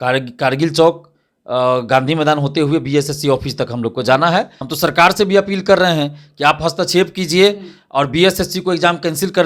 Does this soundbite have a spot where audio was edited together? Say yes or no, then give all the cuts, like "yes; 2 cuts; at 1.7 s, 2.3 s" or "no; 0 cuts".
yes; 1 cut; at 4.6 s